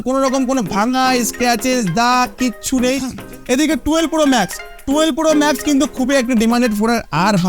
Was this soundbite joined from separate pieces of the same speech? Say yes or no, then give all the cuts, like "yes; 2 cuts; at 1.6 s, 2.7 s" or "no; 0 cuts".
yes; 1 cut; at 3.1 s